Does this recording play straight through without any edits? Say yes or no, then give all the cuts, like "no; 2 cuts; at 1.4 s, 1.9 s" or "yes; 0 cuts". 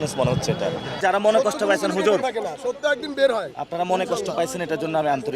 no; 1 cut; at 1.0 s